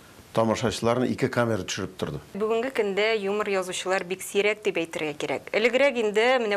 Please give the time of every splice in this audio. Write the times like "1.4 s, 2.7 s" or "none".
2.4 s